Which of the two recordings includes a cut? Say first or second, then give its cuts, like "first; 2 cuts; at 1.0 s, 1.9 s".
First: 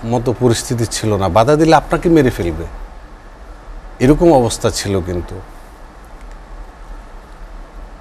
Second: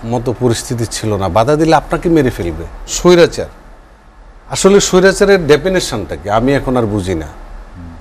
second; 1 cut; at 2.9 s